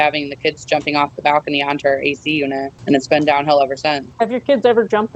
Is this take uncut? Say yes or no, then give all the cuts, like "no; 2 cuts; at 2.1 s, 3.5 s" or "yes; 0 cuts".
no; 2 cuts; at 2.7 s, 4.0 s